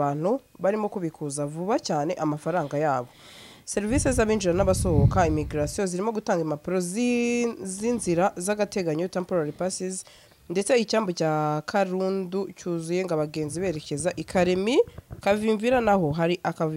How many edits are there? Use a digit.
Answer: 0